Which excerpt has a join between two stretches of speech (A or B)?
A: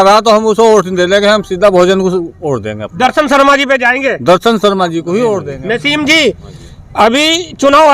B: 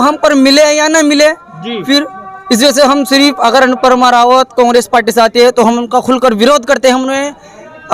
A